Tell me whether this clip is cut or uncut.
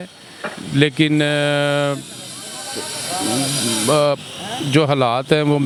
uncut